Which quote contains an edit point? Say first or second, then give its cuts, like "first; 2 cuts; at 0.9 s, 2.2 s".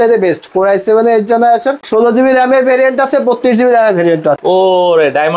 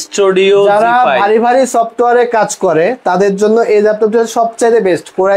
first; 2 cuts; at 1.8 s, 4.4 s